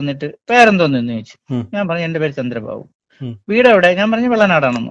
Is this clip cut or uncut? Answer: uncut